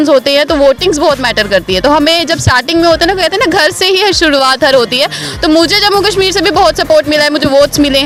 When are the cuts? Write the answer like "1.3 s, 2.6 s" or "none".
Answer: none

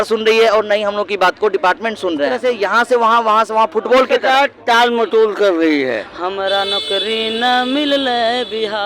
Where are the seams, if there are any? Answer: 2.3 s, 6.1 s

